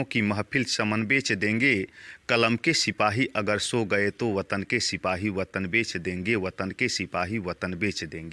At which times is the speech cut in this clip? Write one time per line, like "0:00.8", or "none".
none